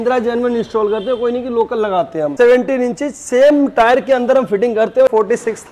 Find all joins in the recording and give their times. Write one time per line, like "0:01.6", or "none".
0:02.3
0:05.1